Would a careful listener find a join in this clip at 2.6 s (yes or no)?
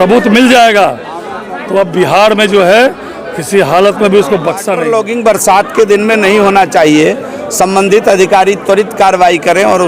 no